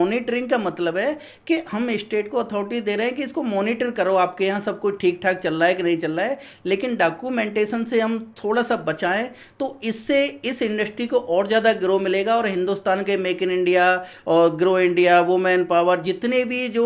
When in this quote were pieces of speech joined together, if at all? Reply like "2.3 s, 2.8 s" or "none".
none